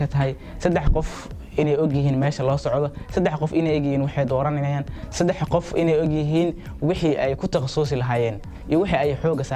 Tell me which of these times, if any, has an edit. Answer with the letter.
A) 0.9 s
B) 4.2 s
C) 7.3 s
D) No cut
D